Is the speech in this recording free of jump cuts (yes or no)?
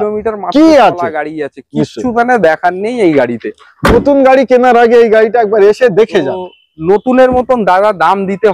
yes